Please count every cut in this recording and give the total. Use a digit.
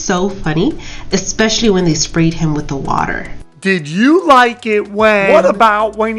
1